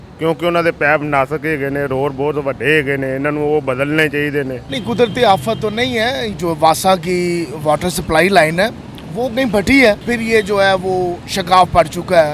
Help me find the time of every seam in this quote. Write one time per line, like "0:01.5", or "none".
0:04.6
0:06.3
0:10.1